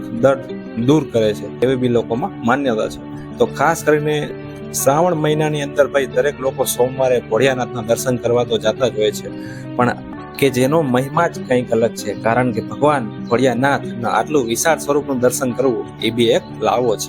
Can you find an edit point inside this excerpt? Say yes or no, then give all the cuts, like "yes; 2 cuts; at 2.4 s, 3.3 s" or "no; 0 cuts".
yes; 1 cut; at 10.1 s